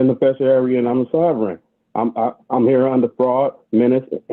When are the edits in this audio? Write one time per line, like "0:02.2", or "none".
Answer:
none